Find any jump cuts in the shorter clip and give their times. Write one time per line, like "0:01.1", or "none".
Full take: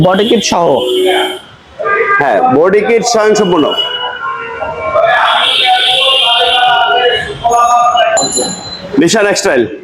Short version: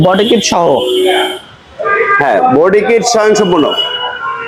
none

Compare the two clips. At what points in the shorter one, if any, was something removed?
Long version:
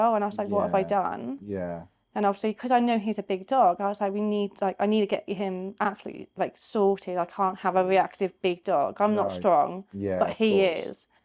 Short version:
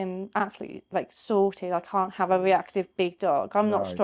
none

